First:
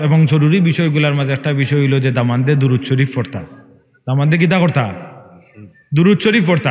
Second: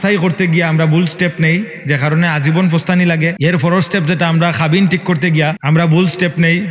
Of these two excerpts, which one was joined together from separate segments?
second; 2 cuts; at 3.4 s, 5.6 s

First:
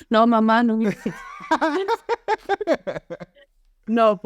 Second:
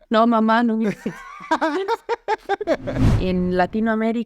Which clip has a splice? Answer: second; 1 cut; at 3.1 s

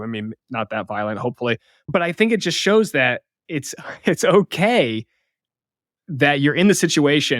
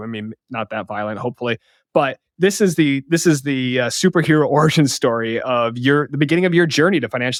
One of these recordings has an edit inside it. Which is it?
first; 1 cut; at 1.7 s

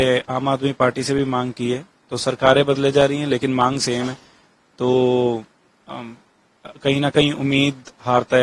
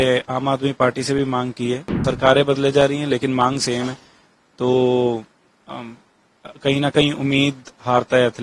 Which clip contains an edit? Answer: second; 1 cut; at 1.9 s

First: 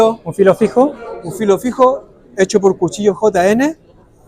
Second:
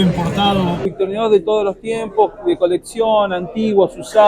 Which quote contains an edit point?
second; 1 cut; at 0.9 s

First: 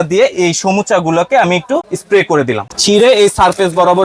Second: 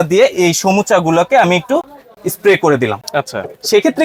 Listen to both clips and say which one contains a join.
first; 2 cuts; at 1.9 s, 2.7 s

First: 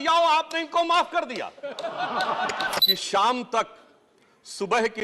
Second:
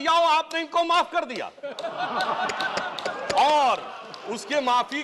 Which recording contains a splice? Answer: first; 1 cut; at 2.8 s

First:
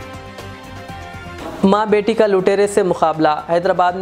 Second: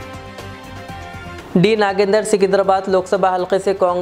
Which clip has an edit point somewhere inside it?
second; 1 cut; at 1.4 s

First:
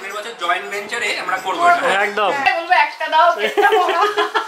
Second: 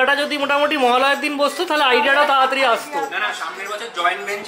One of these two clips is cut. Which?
first; 1 cut; at 2.5 s

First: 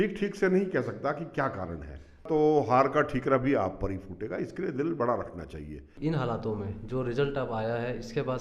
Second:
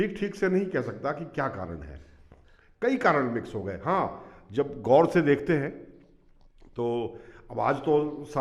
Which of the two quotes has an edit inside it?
first; 2 cuts; at 2.2 s, 5.9 s

